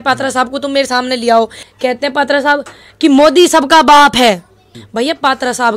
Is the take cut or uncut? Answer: cut